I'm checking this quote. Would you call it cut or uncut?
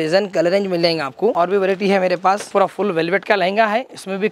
cut